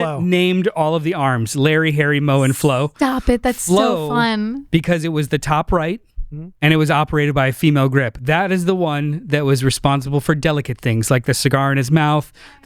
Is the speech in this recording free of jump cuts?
yes; 0 cuts

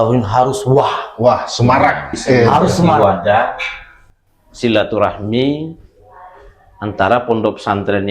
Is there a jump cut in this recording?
yes; 1 cut; at 3.0 s

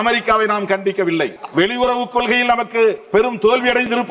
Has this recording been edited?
yes; 2 cuts; at 1.4 s, 3.0 s

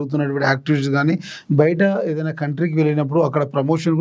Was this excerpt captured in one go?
yes; 0 cuts

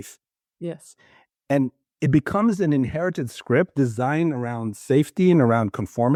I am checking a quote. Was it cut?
no; 0 cuts

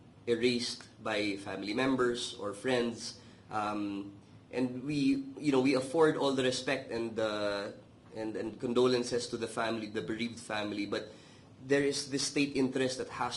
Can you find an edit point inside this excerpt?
no; 0 cuts

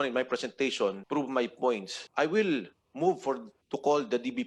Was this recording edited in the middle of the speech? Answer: yes; 2 cuts; at 1.0 s, 2.0 s

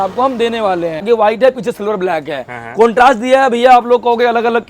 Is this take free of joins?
no; 1 cut; at 1.0 s

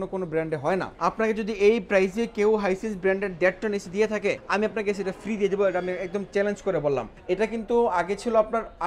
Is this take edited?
yes; 2 cuts; at 0.9 s, 7.1 s

